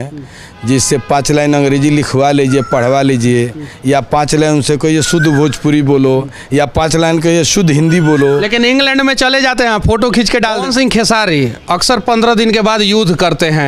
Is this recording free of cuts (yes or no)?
no